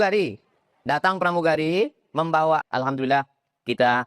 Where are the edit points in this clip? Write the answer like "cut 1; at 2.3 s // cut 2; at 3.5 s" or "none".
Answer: cut 1; at 2.7 s

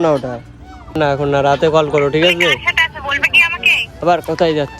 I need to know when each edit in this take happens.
cut 1; at 1.0 s

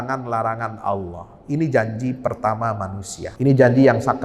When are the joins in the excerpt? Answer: cut 1; at 3.2 s

